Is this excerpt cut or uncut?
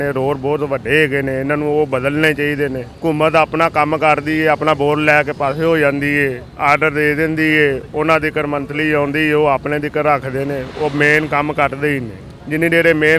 uncut